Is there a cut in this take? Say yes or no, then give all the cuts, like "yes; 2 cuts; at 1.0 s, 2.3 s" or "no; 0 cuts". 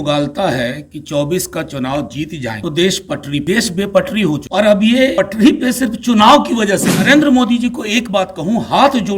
yes; 5 cuts; at 2.6 s, 3.4 s, 4.4 s, 5.1 s, 7.0 s